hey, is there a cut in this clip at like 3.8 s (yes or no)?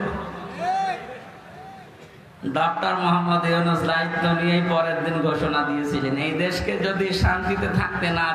no